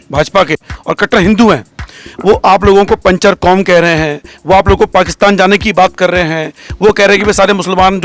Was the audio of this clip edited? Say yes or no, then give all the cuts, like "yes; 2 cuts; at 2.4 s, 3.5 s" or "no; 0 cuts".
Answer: no; 0 cuts